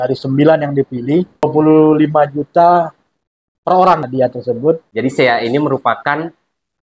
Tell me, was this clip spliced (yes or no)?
yes